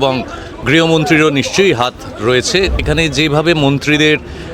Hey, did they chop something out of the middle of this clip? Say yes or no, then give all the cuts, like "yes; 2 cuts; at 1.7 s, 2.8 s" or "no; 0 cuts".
yes; 1 cut; at 2.8 s